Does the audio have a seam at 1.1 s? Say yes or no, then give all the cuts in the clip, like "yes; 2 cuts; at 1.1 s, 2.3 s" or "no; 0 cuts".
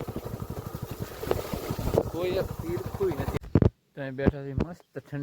no; 1 cut; at 3.4 s